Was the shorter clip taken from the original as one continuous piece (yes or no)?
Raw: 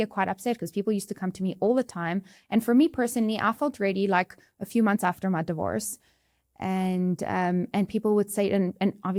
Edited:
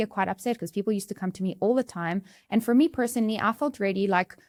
yes